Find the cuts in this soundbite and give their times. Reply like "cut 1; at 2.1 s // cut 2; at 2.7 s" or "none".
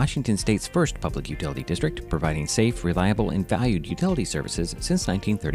none